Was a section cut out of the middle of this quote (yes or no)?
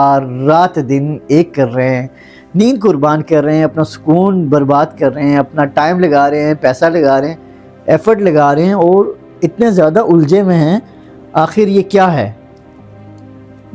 no